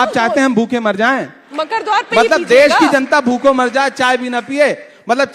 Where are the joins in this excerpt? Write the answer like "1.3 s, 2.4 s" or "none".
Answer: 1.4 s